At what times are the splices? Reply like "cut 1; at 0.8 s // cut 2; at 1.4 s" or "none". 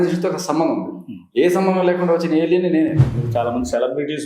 cut 1; at 3.1 s